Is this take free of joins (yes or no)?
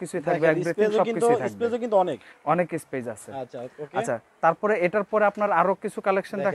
yes